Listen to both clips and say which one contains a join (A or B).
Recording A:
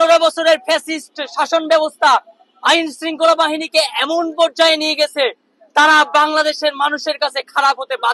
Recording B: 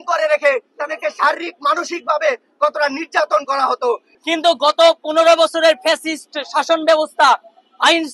B